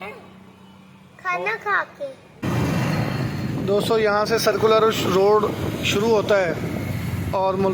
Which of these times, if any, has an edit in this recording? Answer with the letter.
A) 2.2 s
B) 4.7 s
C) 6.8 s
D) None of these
A